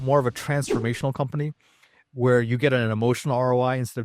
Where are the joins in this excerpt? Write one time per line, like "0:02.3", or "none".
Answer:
none